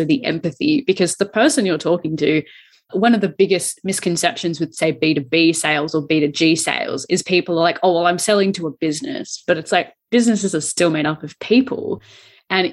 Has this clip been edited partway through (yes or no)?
no